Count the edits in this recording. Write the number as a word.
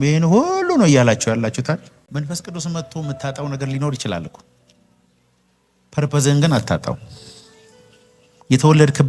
one